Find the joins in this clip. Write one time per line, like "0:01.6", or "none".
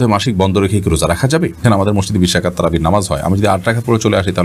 0:01.7